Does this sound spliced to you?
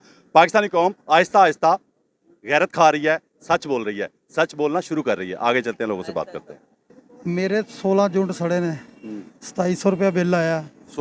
no; 0 cuts

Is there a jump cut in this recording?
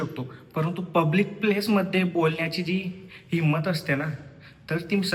no; 0 cuts

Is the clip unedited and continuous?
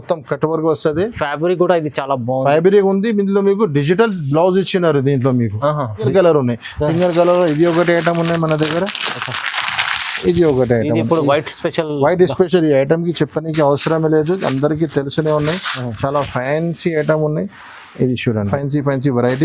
no; 2 cuts; at 6.0 s, 18.5 s

